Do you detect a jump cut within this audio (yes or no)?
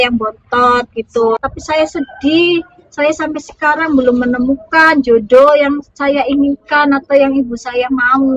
yes